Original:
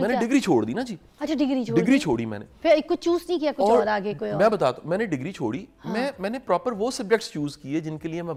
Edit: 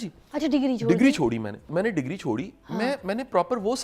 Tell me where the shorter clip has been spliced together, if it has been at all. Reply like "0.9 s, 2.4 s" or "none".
1.7 s